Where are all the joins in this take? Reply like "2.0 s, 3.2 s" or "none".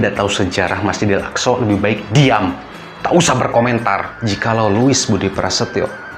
4.1 s